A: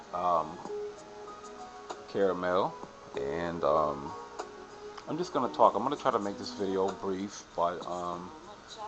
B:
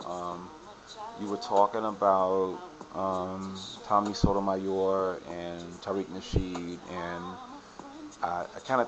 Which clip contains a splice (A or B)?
B